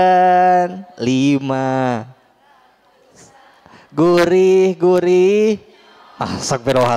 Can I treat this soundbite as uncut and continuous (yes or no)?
yes